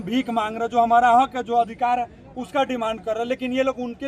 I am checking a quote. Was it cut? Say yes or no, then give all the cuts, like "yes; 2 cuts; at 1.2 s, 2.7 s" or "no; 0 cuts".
no; 0 cuts